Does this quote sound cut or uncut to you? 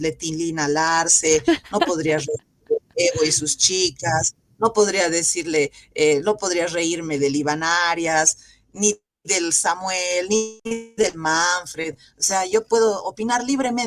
cut